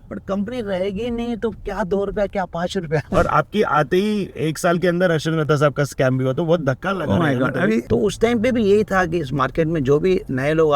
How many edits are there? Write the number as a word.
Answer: two